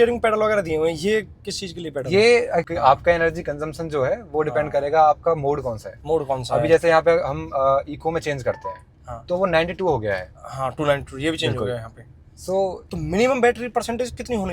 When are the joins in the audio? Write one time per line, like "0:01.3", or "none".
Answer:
0:02.7
0:12.8